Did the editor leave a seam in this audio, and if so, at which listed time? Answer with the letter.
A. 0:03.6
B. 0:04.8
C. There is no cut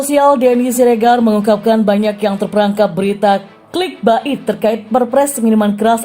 A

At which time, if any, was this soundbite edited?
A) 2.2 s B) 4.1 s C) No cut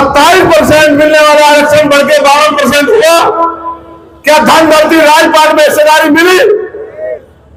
C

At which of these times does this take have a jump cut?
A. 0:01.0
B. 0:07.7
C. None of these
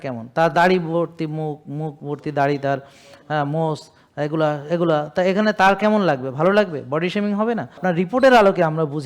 B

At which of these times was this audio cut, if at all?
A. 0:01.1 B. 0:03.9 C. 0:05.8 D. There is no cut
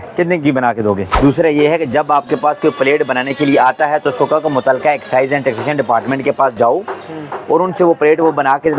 A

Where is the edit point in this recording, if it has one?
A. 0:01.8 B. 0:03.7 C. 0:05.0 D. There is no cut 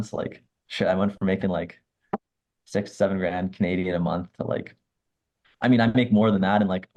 D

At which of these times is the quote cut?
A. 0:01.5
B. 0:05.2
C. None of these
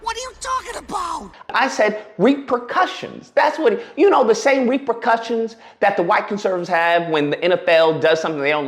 A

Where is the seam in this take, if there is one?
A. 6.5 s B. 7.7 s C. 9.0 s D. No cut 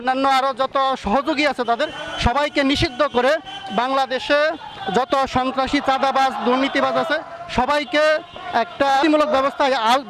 C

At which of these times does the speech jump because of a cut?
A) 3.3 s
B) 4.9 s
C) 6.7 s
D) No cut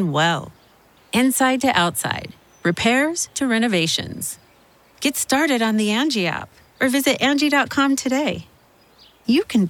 D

